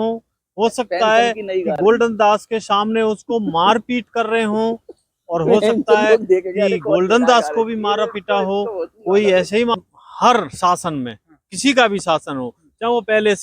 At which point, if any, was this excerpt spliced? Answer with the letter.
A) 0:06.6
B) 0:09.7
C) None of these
B